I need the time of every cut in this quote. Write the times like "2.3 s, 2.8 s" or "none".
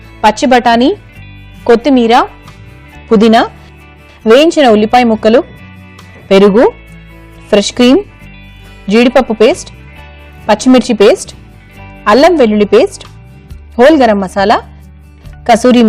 none

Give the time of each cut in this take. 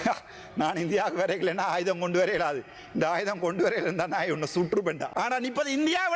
5.1 s

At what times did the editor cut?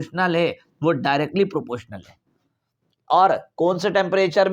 none

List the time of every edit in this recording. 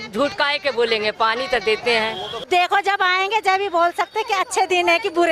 2.4 s

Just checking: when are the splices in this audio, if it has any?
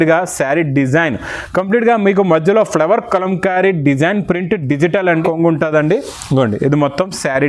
5.2 s

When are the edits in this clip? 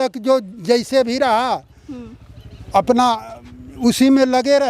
none

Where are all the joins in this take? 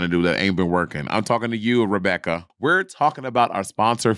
2.5 s

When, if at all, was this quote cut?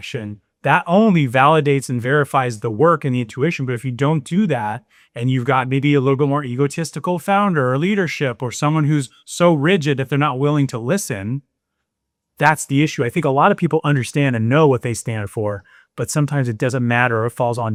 none

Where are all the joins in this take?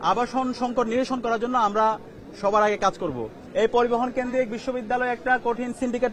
3.3 s

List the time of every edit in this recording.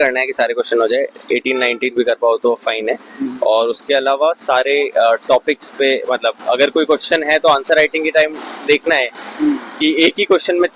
none

